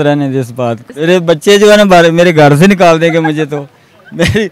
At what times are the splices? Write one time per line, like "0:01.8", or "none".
0:00.9